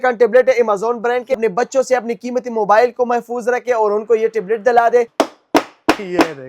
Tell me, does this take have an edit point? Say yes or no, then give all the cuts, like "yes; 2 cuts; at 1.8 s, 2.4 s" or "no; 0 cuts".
yes; 2 cuts; at 1.4 s, 5.1 s